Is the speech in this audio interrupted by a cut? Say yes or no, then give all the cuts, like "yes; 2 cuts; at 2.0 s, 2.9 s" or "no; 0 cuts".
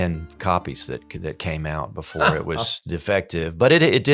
yes; 1 cut; at 2.9 s